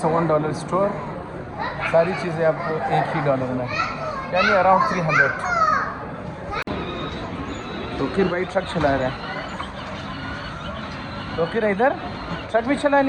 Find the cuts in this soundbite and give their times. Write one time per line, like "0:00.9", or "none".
none